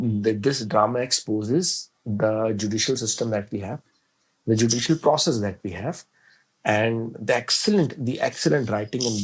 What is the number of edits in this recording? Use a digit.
0